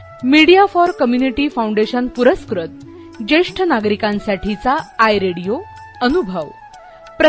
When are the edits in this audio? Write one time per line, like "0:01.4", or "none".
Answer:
none